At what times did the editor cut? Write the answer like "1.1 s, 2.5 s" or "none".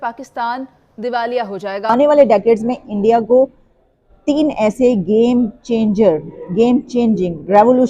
1.9 s